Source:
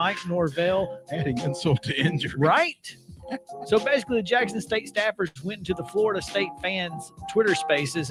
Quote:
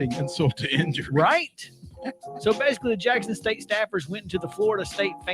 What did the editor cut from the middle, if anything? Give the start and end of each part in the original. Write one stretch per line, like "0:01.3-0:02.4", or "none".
0:05.5-0:05.6